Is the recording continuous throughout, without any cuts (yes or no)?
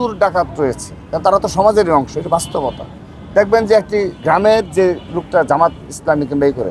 yes